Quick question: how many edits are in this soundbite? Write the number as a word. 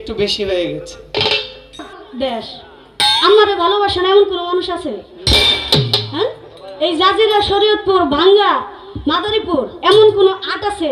one